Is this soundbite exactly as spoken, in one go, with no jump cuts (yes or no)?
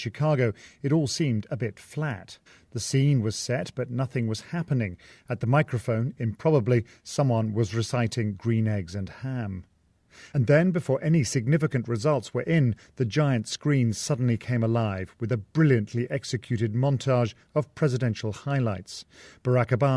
yes